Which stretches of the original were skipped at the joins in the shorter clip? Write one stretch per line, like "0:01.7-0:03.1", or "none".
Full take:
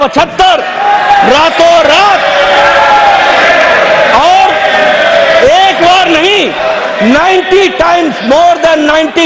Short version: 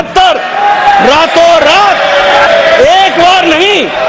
0:02.7-0:05.1